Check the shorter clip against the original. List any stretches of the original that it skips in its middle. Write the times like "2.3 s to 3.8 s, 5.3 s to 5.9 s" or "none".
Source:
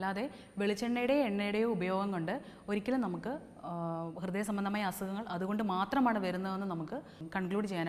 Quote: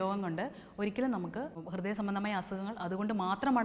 3.5 s to 4.1 s